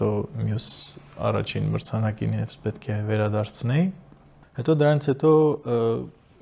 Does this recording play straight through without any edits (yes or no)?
yes